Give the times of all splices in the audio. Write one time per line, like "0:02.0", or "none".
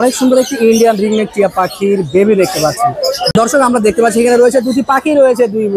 0:03.3